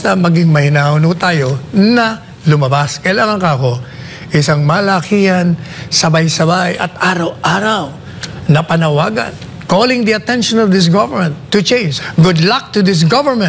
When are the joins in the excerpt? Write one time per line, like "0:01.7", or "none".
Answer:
0:12.0